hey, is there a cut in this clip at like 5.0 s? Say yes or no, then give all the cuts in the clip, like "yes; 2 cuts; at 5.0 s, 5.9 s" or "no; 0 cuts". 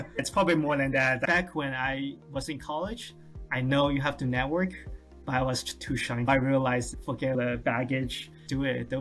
no; 3 cuts; at 1.2 s, 6.3 s, 7.3 s